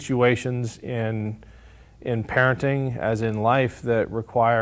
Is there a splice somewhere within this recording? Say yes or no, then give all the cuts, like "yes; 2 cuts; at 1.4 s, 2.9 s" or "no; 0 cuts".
no; 0 cuts